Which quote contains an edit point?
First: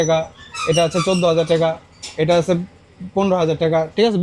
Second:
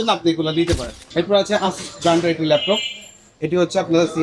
second; 1 cut; at 1.0 s

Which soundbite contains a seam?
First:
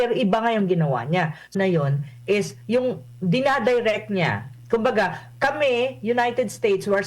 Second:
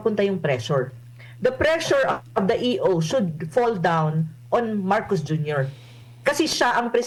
first; 1 cut; at 1.5 s

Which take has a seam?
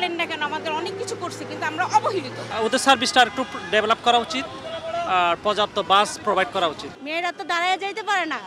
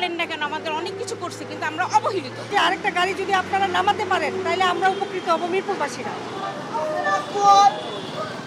first; 2 cuts; at 2.4 s, 6.9 s

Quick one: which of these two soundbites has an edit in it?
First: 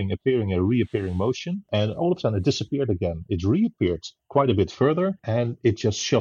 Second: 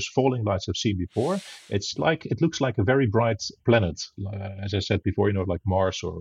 first; 2 cuts; at 1.5 s, 5.2 s

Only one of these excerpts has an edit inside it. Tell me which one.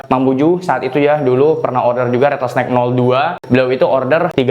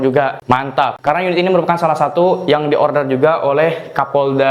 first; 1 cut; at 3.4 s

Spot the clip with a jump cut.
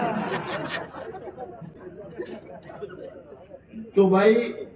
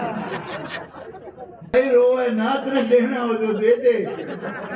second; 1 cut; at 1.7 s

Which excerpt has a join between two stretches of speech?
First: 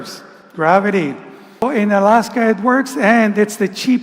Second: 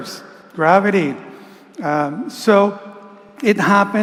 first; 1 cut; at 1.6 s

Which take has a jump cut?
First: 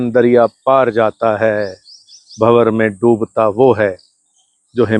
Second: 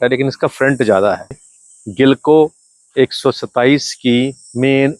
second; 1 cut; at 1.5 s

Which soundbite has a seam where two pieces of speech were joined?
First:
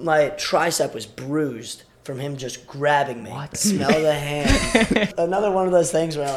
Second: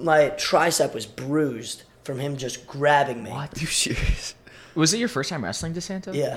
first; 2 cuts; at 3.6 s, 5.1 s

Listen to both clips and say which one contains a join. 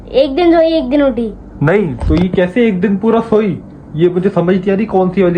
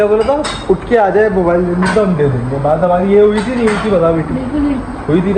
first; 1 cut; at 1.5 s

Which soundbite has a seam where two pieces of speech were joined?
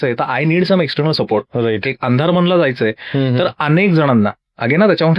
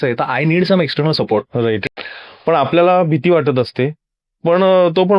second; 1 cut; at 1.9 s

